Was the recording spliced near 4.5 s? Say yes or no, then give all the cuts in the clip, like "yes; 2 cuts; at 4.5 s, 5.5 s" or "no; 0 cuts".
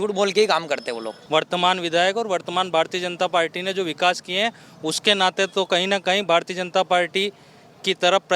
no; 1 cut; at 1.1 s